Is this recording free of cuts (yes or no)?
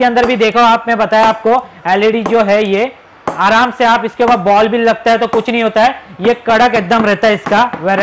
yes